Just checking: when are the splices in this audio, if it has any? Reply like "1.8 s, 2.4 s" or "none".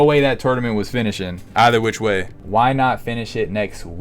2.4 s